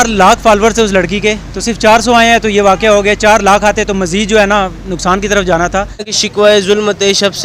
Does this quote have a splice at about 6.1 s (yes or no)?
yes